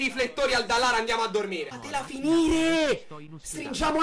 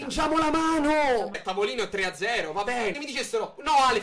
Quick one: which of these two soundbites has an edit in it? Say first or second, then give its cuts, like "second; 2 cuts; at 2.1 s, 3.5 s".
second; 2 cuts; at 1.4 s, 3.0 s